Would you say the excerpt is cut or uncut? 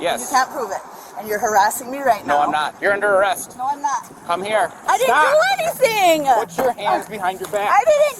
cut